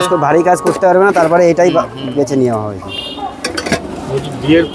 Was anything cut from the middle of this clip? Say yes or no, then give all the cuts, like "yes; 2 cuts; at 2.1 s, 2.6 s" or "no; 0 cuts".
no; 0 cuts